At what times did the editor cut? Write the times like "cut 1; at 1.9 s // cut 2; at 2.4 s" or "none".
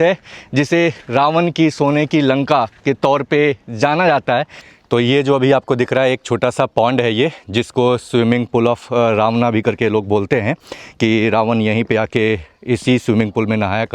none